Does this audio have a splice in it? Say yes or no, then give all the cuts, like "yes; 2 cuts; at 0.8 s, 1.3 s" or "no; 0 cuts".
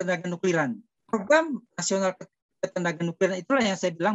yes; 2 cuts; at 0.9 s, 1.7 s